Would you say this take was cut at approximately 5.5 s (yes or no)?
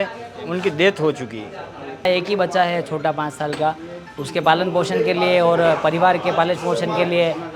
no